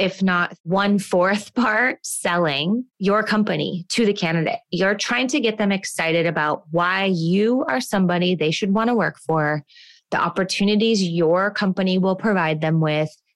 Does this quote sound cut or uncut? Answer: cut